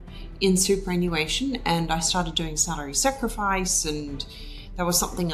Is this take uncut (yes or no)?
yes